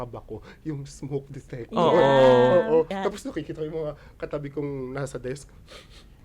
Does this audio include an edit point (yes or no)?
yes